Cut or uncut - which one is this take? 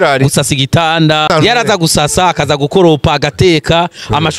cut